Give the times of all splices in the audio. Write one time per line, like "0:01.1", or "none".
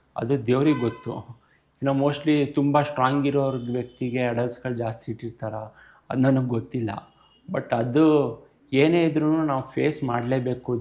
none